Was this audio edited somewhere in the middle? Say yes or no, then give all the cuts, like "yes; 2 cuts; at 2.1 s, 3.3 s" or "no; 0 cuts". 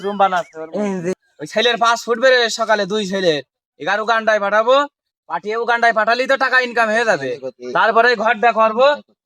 yes; 1 cut; at 1.2 s